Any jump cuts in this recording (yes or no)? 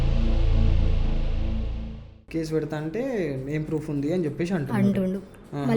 yes